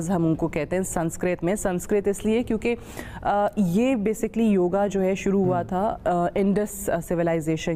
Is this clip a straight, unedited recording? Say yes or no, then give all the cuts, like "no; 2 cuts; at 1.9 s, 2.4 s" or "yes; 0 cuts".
yes; 0 cuts